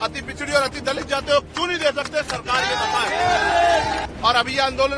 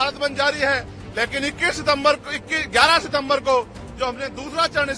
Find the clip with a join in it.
first; 1 cut; at 4.0 s

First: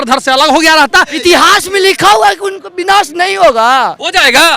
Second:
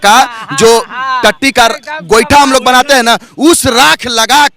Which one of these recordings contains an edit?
first; 1 cut; at 1.1 s

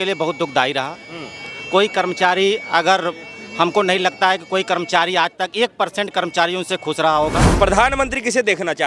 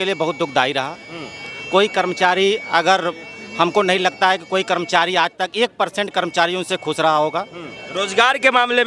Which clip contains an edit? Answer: first; 1 cut; at 7.4 s

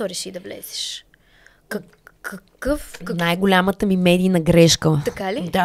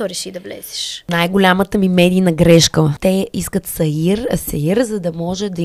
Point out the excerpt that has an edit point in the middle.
second; 2 cuts; at 1.1 s, 3.0 s

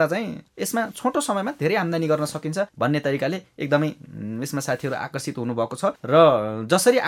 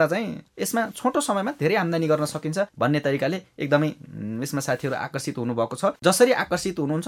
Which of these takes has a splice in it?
second; 1 cut; at 6.0 s

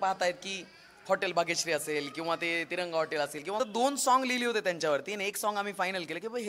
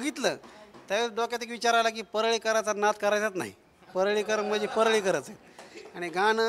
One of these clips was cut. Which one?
first; 1 cut; at 3.6 s

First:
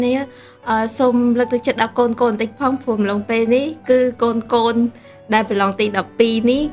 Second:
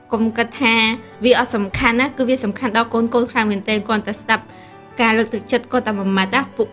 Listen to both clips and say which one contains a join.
second; 1 cut; at 1.1 s

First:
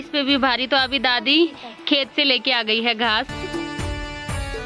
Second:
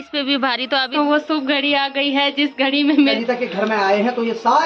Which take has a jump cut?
second; 2 cuts; at 0.9 s, 3.2 s

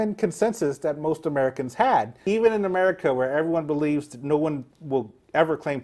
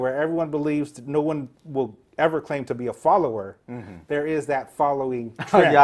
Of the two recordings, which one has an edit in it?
first; 1 cut; at 2.2 s

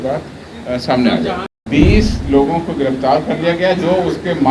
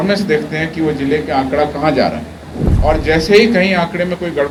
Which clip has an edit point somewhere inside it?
first; 1 cut; at 1.5 s

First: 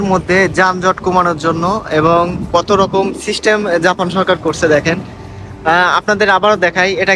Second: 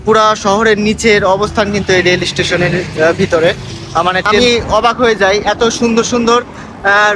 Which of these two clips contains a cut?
second; 1 cut; at 4.3 s

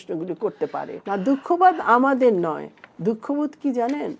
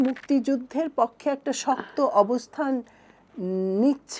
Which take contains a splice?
first; 1 cut; at 0.9 s

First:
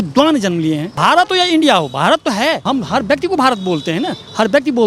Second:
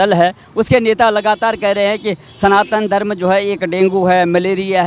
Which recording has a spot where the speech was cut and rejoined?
first; 2 cuts; at 0.9 s, 2.6 s

